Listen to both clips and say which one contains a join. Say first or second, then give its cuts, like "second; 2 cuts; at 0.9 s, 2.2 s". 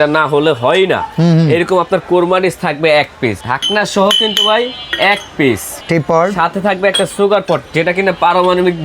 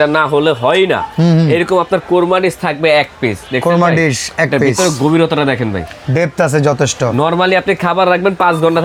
first; 2 cuts; at 3.4 s, 5.8 s